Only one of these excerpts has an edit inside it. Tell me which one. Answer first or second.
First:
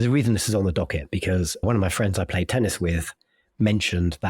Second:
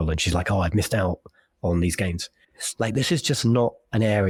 first